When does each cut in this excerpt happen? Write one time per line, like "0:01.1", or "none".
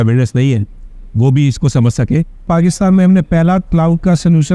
0:02.5